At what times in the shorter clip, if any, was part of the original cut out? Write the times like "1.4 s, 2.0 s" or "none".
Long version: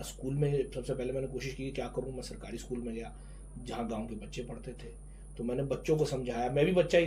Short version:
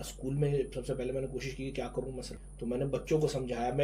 2.4 s